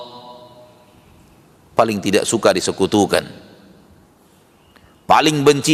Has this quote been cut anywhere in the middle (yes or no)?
no